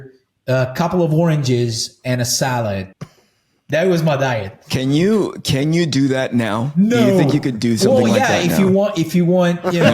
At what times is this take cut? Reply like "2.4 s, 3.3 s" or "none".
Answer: 2.9 s

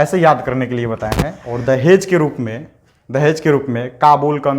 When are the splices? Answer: 1.4 s

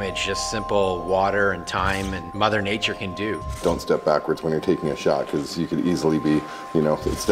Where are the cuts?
2.3 s, 3.6 s

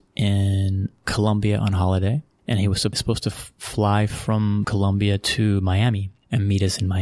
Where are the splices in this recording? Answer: 3.0 s, 4.7 s

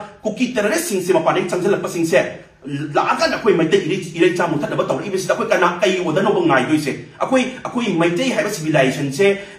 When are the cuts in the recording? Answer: none

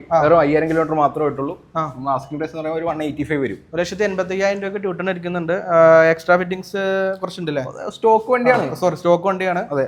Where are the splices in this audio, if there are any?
none

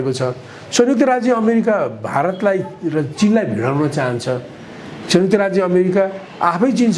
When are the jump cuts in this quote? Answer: none

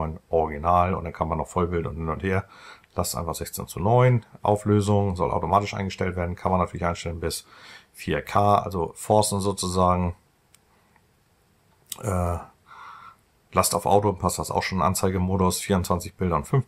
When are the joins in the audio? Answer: none

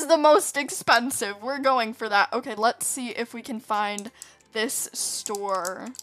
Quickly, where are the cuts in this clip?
none

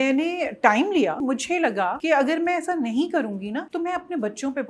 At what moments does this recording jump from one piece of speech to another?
1.5 s, 3.7 s

